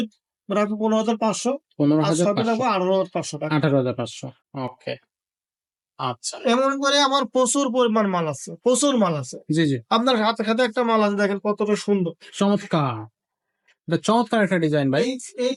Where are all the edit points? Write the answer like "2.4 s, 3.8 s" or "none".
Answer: none

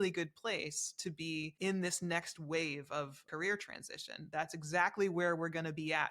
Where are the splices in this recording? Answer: 1.5 s, 3.2 s, 4.2 s

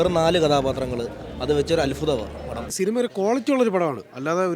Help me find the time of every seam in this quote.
2.9 s

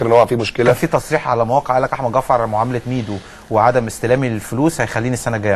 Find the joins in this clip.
none

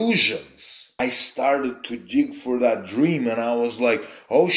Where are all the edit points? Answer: 1.0 s

